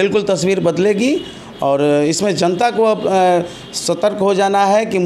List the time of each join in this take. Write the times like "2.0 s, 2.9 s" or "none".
none